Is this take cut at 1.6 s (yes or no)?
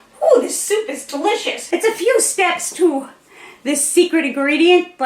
yes